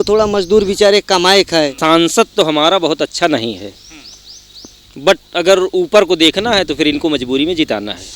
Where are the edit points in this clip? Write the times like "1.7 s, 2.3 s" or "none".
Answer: 1.8 s

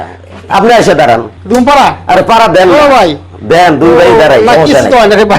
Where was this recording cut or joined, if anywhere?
1.3 s

